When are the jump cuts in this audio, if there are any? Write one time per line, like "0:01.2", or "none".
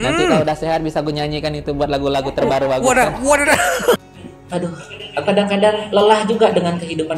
0:04.0